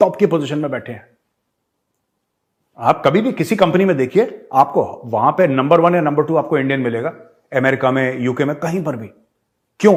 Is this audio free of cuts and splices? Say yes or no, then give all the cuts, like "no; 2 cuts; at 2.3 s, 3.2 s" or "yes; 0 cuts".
yes; 0 cuts